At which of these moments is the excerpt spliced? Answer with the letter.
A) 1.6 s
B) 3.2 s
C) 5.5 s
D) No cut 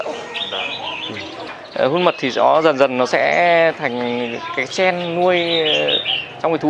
A